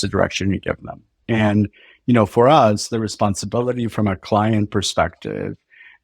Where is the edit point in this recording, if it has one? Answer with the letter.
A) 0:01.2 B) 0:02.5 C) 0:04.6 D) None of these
A